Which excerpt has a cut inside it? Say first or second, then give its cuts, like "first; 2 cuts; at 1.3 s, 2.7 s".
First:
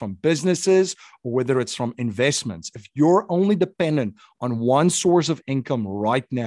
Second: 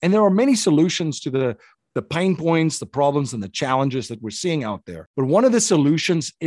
second; 2 cuts; at 1.7 s, 4.9 s